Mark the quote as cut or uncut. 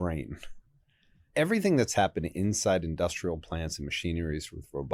cut